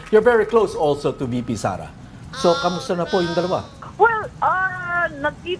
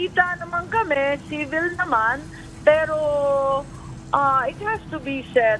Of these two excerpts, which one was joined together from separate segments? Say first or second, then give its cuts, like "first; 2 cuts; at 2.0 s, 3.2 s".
first; 1 cut; at 3.8 s